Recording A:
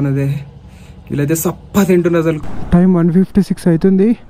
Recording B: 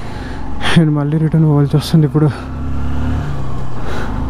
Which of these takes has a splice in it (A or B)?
A